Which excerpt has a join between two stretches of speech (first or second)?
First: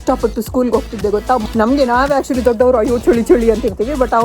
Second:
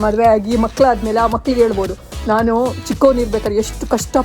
first